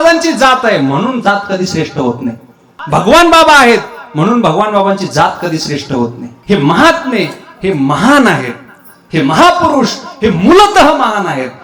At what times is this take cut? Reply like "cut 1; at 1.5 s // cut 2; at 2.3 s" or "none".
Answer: cut 1; at 2.7 s // cut 2; at 6.3 s